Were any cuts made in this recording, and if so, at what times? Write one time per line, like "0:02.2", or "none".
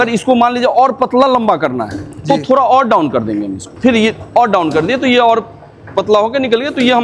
0:03.6